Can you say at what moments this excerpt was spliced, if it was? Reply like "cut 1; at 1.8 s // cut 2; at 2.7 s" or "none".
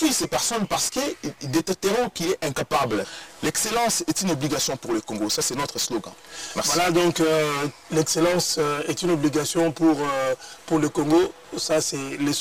cut 1; at 3.1 s